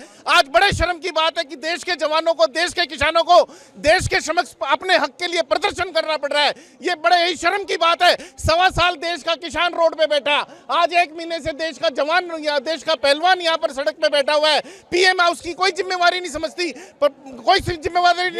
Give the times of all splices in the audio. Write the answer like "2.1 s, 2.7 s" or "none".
none